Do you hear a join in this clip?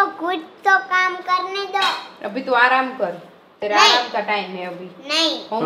no; 0 cuts

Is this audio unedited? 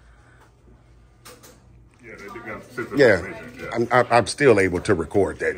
no; 1 cut; at 2.4 s

